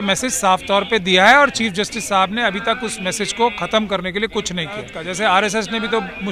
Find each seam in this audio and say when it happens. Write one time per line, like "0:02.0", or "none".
0:05.0

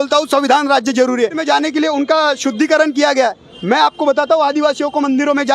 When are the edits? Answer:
0:01.4

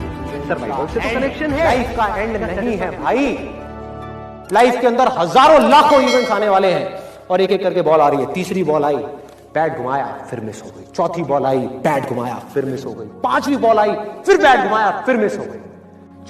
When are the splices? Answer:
0:01.7

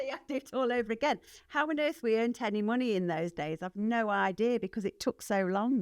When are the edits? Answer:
none

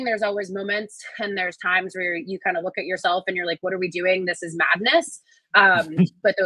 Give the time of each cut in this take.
none

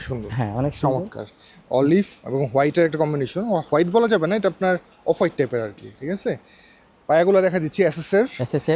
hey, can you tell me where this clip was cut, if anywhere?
none

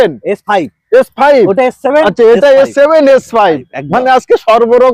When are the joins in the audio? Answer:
none

